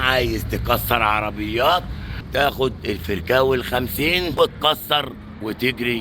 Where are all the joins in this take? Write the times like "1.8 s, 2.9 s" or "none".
4.4 s